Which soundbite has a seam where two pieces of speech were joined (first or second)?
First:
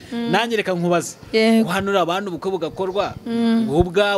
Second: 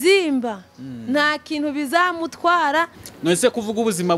second